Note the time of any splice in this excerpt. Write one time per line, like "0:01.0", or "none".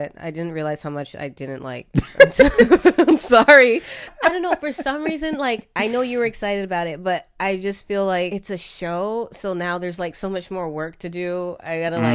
0:04.1
0:08.3